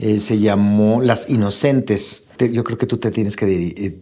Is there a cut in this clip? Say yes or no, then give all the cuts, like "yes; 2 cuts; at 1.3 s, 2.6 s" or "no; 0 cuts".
yes; 1 cut; at 2.3 s